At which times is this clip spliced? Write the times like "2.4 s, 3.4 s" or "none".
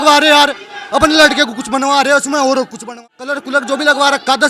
3.0 s